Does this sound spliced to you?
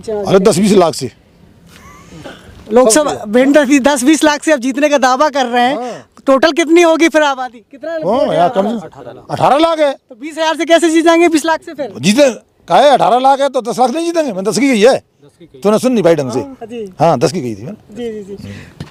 no; 0 cuts

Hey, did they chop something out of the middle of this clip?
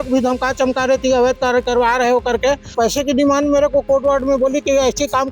yes; 1 cut; at 2.7 s

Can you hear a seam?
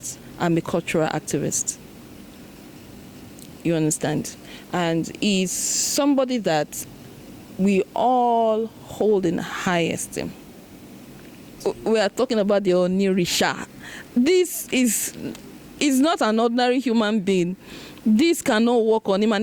yes; 1 cut; at 11.5 s

